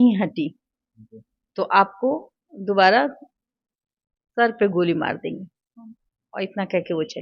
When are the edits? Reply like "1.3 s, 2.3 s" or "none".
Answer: none